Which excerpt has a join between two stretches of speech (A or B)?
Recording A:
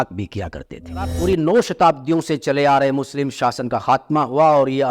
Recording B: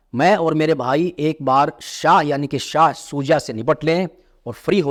A